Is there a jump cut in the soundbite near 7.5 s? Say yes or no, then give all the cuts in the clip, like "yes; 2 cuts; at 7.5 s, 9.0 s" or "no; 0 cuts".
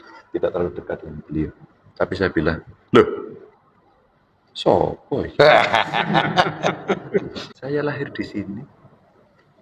yes; 1 cut; at 7.5 s